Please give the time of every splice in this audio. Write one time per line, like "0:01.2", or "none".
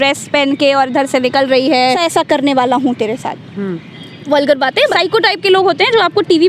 0:02.0
0:04.9